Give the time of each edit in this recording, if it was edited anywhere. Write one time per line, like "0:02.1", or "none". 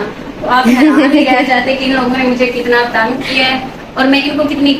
none

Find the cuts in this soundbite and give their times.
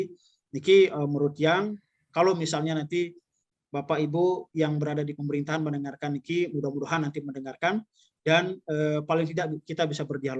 none

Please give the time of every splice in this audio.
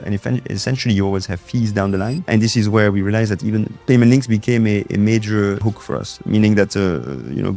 0:02.3
0:05.7

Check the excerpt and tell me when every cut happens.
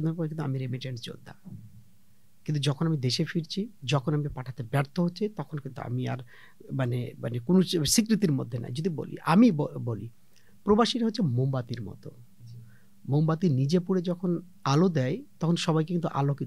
none

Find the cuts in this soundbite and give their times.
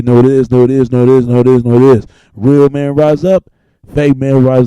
0:03.6

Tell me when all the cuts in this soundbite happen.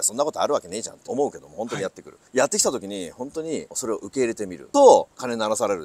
0:01.0

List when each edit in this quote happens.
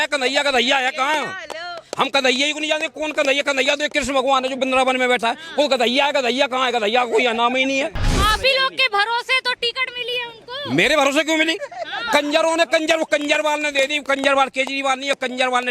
0:08.2

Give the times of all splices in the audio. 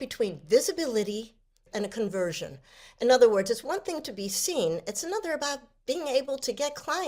0:01.6

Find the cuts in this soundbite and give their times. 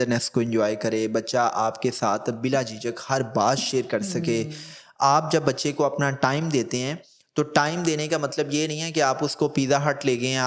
none

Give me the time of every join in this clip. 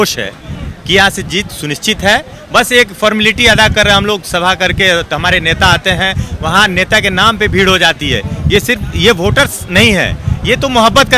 none

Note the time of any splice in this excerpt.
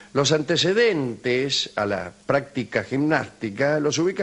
0:02.7

